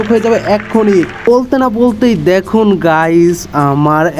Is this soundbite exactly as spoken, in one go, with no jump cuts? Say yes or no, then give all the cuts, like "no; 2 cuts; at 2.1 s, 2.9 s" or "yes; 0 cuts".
no; 1 cut; at 1.2 s